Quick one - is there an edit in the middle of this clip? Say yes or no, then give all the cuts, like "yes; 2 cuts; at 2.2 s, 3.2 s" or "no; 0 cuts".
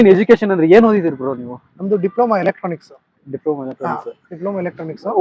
no; 0 cuts